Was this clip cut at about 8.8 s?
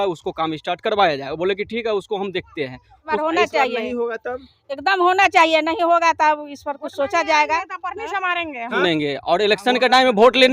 yes; 2 cuts; at 3.1 s, 8.8 s

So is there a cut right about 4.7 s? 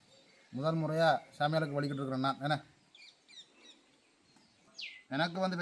yes; 1 cut; at 4.7 s

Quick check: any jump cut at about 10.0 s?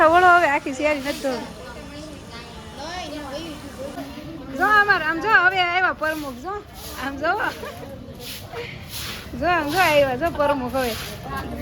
no; 1 cut; at 4.0 s

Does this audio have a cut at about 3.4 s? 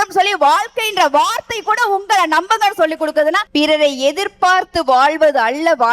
yes; 1 cut; at 3.4 s

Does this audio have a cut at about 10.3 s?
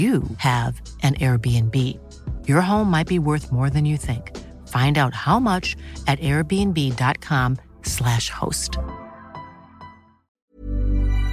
yes; 1 cut; at 10.3 s

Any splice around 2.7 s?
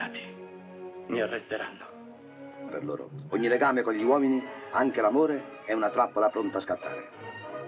no; 0 cuts

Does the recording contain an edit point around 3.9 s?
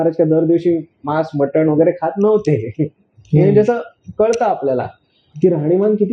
no; 0 cuts

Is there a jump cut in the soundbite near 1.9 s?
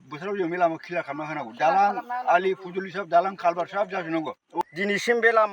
no; 1 cut; at 4.6 s

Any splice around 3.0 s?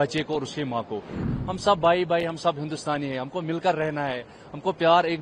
no; 1 cut; at 1.2 s

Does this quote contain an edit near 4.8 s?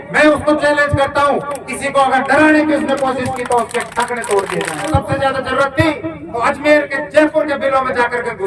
yes; 1 cut; at 4.8 s

